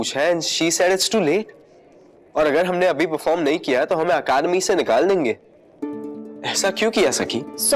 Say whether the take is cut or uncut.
uncut